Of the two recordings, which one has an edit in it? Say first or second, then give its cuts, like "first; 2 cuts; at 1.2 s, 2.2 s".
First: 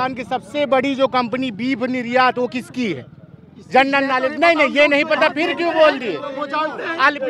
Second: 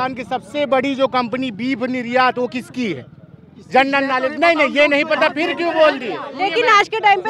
second; 1 cut; at 6.3 s